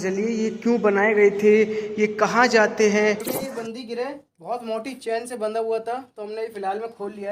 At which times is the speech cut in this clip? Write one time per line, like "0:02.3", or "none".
0:03.3